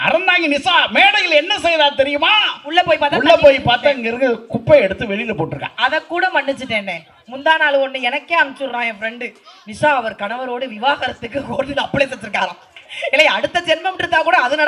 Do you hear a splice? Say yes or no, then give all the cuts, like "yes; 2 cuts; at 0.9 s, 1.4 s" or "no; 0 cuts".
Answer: no; 0 cuts